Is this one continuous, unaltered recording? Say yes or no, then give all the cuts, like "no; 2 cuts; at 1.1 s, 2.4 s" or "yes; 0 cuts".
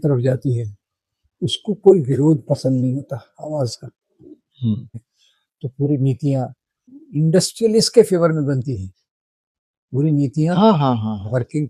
no; 2 cuts; at 4.9 s, 7.0 s